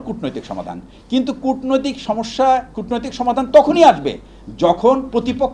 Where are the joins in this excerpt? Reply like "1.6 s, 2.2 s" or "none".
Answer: none